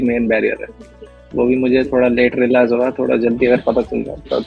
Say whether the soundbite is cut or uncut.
uncut